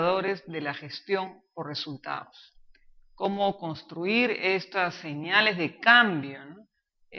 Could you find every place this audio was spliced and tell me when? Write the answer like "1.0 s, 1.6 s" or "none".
3.6 s